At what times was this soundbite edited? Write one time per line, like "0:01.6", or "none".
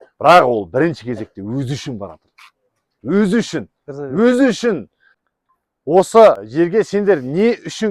0:05.1
0:06.4